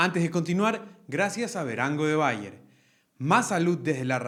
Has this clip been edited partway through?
no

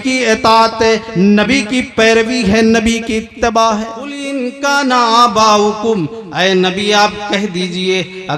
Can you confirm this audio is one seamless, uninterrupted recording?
no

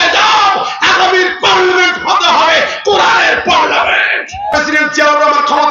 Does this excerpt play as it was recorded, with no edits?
no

